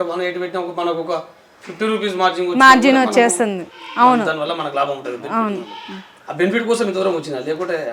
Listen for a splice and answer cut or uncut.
uncut